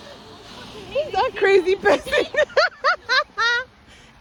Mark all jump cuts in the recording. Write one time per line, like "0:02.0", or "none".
none